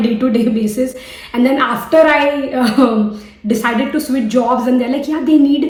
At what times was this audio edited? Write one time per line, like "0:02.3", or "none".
none